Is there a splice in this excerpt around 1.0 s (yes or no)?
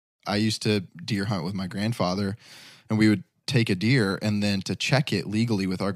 yes